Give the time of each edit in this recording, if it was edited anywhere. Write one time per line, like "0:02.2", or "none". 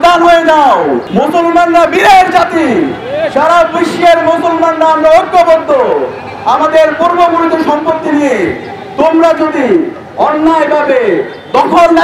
0:01.0